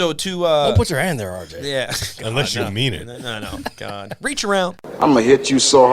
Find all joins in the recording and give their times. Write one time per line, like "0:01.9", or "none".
0:04.8